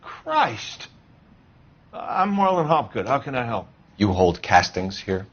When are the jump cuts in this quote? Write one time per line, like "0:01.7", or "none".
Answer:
none